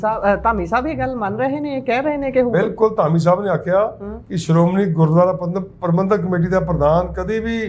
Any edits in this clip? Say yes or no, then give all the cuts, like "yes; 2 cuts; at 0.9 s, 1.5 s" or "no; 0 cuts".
no; 0 cuts